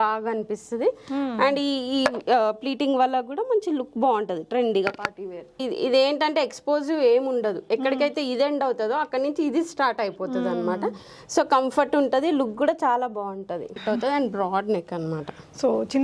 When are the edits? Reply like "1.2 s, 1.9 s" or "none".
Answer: 5.6 s, 13.8 s